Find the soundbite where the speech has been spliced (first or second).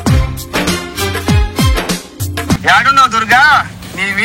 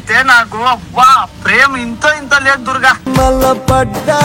first